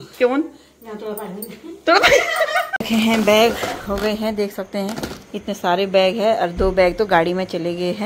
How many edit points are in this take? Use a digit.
1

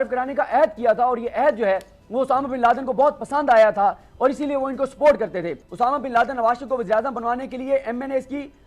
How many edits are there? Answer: 1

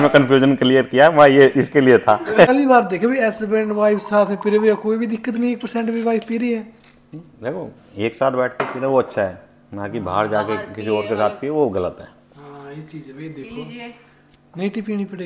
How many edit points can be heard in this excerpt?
1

